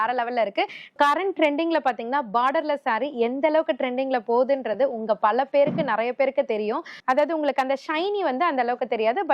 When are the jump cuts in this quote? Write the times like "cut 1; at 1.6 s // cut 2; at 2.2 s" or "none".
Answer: cut 1; at 0.9 s // cut 2; at 6.9 s